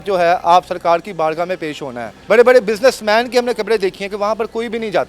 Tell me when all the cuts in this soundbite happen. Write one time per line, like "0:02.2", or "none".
0:02.1

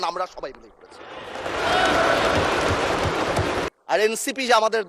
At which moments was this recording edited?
0:03.7

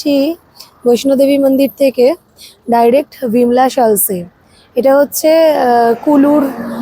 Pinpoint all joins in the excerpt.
none

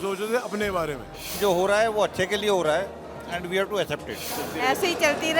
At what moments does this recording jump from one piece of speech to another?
0:01.3
0:04.3

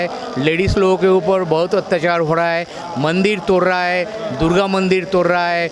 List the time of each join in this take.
none

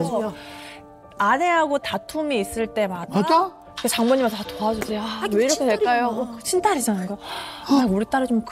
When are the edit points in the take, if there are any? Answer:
none

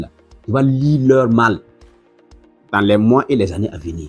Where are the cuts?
none

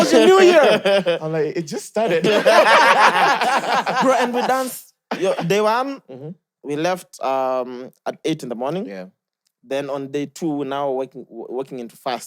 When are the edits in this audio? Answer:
none

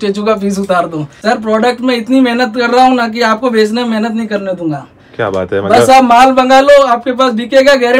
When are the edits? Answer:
0:01.1

